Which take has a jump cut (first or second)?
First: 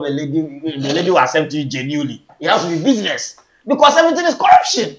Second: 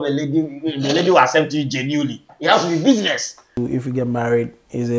second